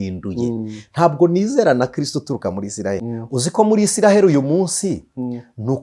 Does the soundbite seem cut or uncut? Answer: cut